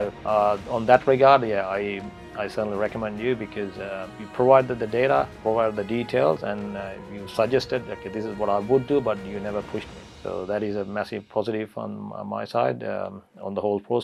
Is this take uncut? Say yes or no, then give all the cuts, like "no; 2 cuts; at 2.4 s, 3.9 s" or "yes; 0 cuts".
yes; 0 cuts